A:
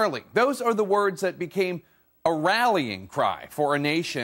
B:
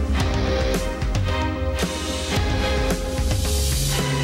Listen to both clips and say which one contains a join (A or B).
A